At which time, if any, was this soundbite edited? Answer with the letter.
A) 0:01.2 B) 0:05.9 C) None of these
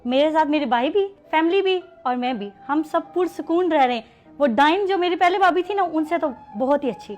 A